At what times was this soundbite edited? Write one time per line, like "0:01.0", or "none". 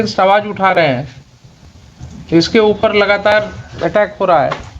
none